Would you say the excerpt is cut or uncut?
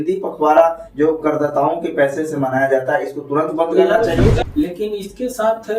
cut